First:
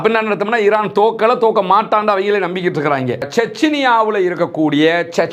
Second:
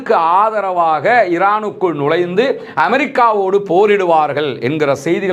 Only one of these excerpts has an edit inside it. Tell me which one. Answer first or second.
first